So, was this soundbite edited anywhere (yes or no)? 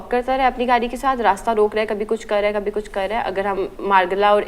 no